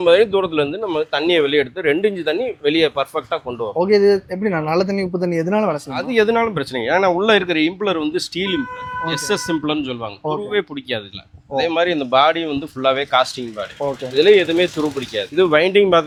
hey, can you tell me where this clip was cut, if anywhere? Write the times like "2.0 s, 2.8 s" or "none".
none